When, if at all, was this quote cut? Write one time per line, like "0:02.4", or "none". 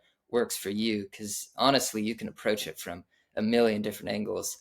none